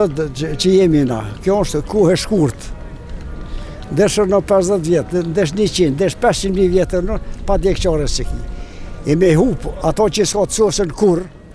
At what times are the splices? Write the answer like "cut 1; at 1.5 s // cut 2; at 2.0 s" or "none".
none